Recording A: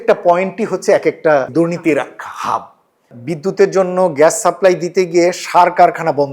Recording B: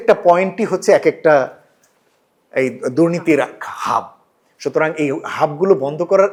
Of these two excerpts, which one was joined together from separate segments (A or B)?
A